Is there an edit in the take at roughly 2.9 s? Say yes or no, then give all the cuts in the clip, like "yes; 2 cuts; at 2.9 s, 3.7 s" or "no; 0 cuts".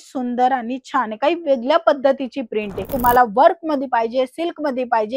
yes; 1 cut; at 2.9 s